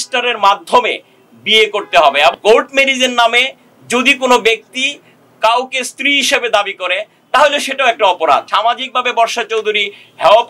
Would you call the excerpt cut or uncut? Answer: cut